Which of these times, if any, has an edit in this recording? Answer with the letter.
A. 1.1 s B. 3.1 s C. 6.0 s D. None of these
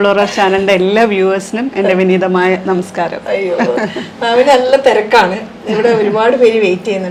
D